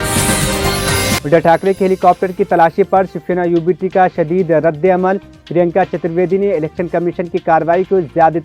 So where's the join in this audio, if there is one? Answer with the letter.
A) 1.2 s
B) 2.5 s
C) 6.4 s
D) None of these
A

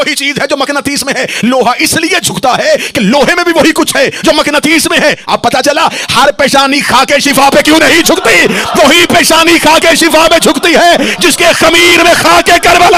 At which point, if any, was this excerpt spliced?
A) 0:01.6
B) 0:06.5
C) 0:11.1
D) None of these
D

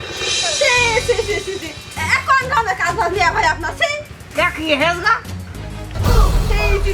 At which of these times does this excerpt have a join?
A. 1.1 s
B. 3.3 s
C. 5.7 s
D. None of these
D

